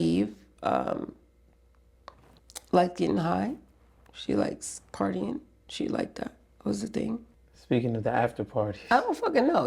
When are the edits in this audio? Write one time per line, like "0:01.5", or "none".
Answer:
0:07.4